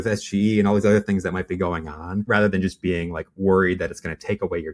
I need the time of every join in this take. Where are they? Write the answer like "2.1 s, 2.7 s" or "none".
none